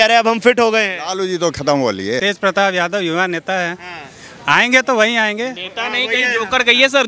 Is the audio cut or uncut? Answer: cut